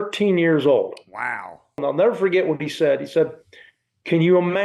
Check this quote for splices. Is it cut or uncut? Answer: cut